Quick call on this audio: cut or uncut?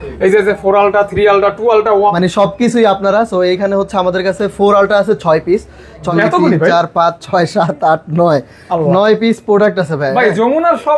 cut